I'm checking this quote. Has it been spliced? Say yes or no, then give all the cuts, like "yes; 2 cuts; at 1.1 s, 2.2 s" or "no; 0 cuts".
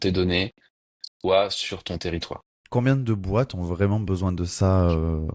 no; 0 cuts